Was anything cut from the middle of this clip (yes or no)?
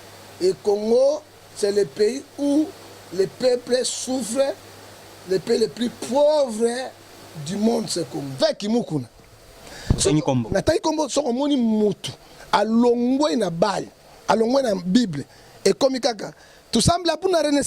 yes